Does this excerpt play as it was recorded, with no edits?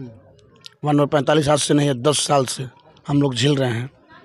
yes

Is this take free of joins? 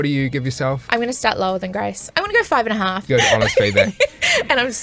no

